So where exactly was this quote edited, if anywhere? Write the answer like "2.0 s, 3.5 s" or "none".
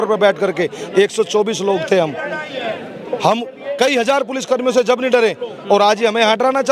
none